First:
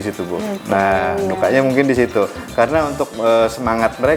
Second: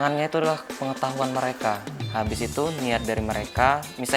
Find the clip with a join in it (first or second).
second